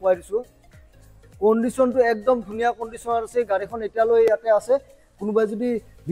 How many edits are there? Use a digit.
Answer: 1